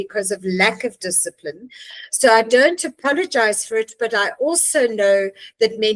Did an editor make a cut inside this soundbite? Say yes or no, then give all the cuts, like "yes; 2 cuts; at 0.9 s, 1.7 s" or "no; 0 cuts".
no; 0 cuts